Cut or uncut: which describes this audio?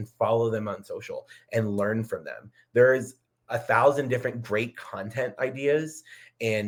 uncut